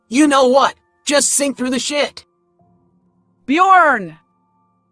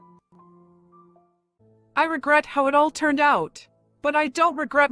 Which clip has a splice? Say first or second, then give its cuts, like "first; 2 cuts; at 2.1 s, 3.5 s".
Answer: second; 1 cut; at 1.5 s